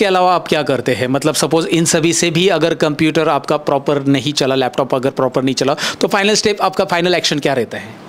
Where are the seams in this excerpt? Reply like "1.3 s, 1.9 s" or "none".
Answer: none